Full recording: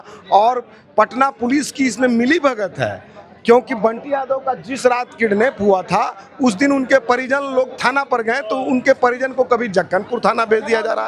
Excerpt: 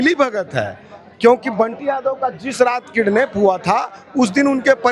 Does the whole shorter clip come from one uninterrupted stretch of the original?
yes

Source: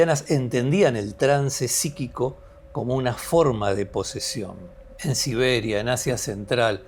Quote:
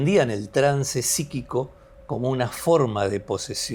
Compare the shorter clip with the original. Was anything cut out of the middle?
no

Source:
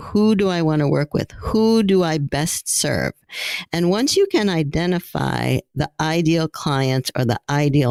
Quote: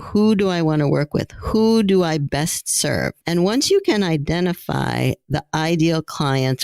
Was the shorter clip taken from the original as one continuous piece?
no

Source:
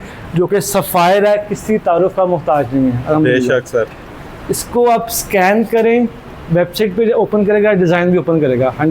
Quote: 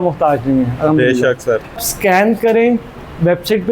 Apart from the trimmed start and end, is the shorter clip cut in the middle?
yes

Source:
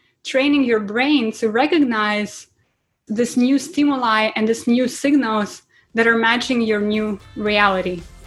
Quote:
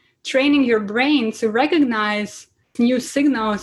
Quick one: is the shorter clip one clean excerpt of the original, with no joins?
no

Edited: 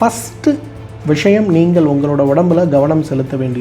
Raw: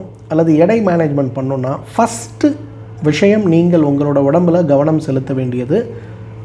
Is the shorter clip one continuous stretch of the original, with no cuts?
yes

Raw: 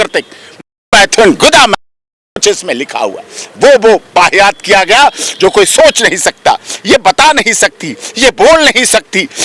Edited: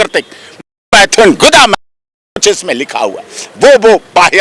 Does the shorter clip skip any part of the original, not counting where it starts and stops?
no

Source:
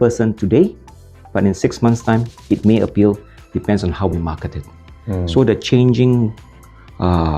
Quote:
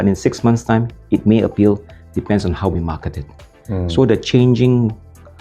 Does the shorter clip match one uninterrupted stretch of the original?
yes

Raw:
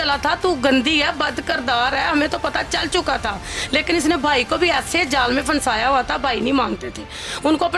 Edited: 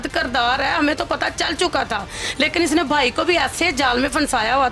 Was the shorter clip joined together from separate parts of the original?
no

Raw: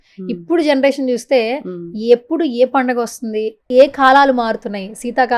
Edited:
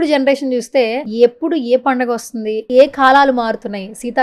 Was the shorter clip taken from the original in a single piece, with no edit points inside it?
no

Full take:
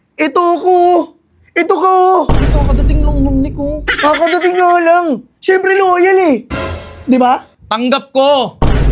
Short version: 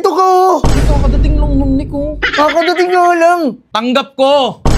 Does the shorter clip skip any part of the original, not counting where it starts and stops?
yes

